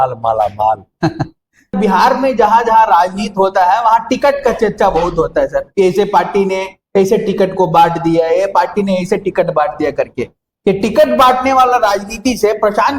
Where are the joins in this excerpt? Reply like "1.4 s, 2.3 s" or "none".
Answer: 1.7 s